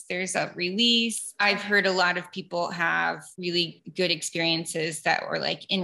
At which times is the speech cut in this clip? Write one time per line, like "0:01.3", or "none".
0:01.3
0:03.7